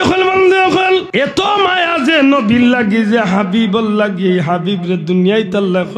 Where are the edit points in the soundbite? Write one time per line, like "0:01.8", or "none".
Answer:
0:01.1

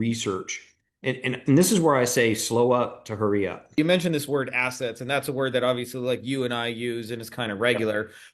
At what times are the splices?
0:03.7

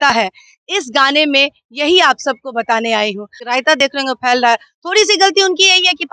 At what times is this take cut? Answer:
0:03.3

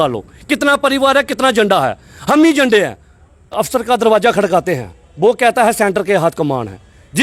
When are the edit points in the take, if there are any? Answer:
0:03.7

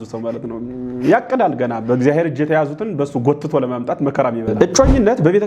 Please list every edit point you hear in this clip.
0:04.5

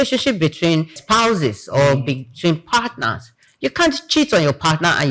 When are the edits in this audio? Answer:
0:01.0

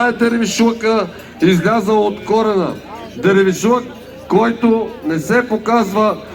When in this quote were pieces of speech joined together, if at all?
none

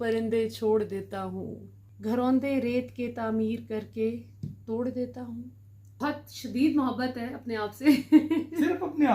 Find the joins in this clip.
0:02.0
0:06.0

